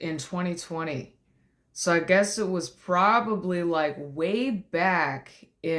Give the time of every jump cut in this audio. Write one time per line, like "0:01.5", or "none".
none